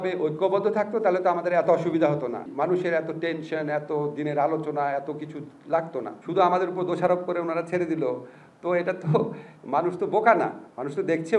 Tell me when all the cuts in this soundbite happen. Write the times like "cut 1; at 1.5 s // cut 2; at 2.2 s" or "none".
cut 1; at 2.5 s // cut 2; at 6.2 s